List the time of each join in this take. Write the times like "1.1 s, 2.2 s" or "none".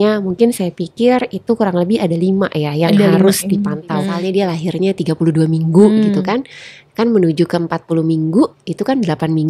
4.2 s